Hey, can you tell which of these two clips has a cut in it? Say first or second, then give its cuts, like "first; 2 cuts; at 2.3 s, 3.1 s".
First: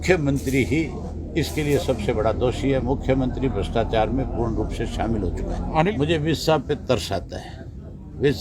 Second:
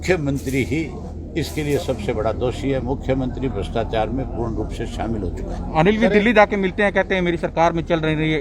first; 1 cut; at 5.9 s